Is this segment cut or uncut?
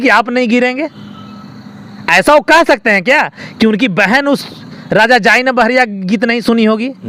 uncut